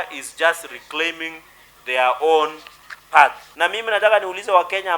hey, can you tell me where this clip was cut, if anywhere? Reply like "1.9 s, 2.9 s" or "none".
3.4 s